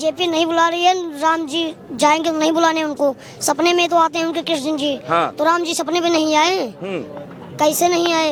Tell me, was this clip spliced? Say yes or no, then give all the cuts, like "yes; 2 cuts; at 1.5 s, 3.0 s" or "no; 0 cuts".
no; 0 cuts